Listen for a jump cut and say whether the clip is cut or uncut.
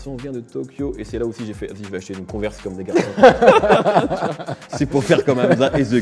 uncut